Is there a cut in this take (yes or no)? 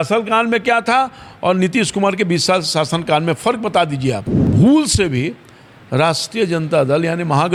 no